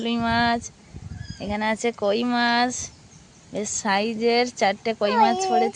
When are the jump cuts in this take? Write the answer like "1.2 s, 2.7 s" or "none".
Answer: none